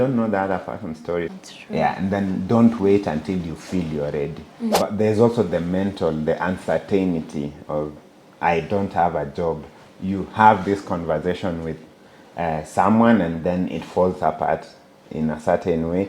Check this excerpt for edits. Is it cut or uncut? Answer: cut